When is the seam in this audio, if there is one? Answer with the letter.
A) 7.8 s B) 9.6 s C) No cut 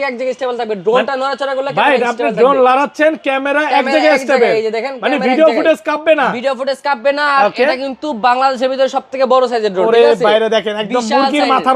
C